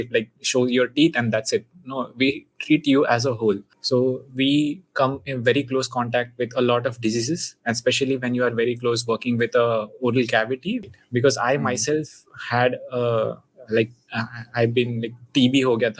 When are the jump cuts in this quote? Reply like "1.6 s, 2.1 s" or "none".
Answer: 3.7 s, 10.8 s